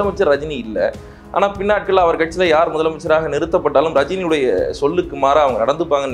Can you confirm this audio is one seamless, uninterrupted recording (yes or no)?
yes